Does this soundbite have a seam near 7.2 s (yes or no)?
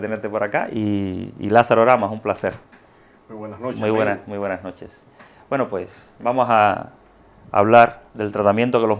no